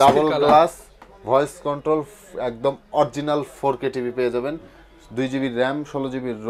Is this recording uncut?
yes; 0 cuts

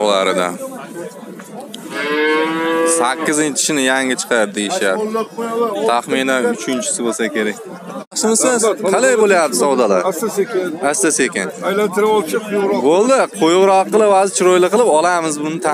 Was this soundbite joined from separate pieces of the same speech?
yes; 1 cut; at 8.2 s

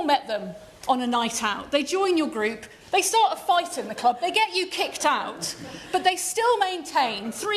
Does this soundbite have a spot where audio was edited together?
no; 0 cuts

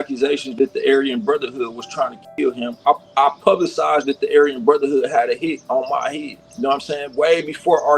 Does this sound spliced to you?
yes; 1 cut; at 2.8 s

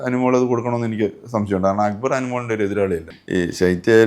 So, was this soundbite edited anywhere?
yes; 1 cut; at 3.1 s

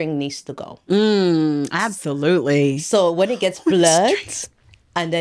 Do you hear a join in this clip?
no; 0 cuts

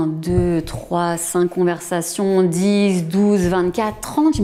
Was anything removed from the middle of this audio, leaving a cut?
no; 0 cuts

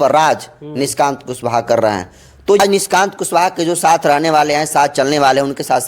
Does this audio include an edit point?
yes; 1 cut; at 2.6 s

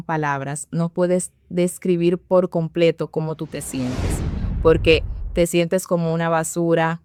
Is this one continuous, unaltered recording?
yes; 0 cuts

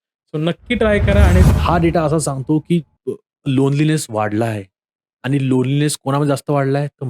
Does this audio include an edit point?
yes; 1 cut; at 1.5 s

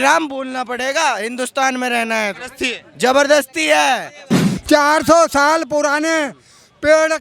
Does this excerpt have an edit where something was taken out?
yes; 1 cut; at 4.5 s

